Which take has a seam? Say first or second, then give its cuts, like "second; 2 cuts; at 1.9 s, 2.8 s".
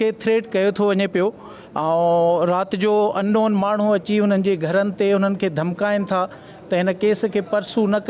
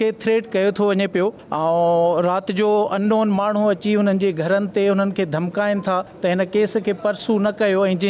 second; 2 cuts; at 1.4 s, 6.1 s